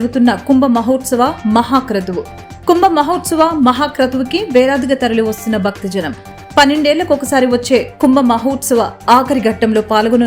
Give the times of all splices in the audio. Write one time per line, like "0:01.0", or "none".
none